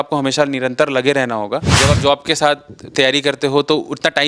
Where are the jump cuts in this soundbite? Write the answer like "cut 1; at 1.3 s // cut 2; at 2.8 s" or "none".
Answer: cut 1; at 1.8 s